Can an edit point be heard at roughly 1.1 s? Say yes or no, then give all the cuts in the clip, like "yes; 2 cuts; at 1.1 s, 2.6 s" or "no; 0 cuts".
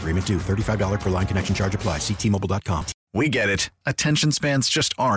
no; 1 cut; at 3.0 s